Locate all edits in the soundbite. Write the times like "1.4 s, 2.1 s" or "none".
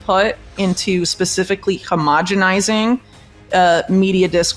none